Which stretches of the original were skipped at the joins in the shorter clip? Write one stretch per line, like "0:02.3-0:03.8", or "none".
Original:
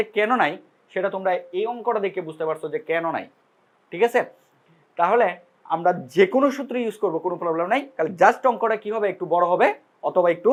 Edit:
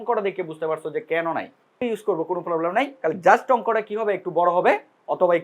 0:03.5-0:06.7